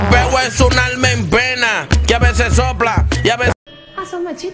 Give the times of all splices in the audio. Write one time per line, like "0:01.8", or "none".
0:03.5